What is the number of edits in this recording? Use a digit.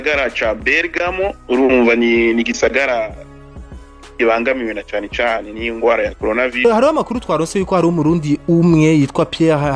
1